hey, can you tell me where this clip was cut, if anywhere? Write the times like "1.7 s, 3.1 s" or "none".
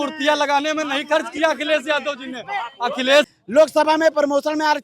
3.3 s